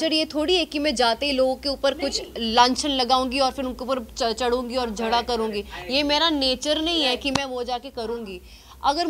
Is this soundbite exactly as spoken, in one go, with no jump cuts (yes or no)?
yes